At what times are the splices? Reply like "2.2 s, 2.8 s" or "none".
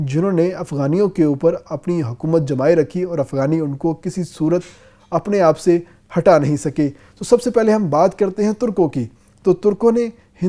none